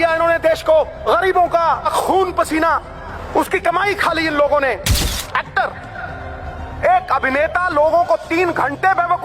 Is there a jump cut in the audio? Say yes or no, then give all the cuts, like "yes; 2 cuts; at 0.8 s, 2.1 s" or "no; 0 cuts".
yes; 4 cuts; at 1.0 s, 1.9 s, 3.1 s, 5.0 s